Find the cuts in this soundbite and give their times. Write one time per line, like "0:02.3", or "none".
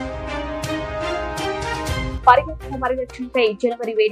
none